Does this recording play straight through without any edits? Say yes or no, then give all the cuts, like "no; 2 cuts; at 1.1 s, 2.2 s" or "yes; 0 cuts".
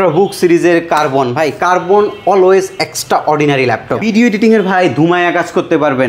no; 1 cut; at 4.0 s